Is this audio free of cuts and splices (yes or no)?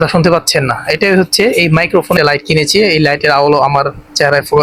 no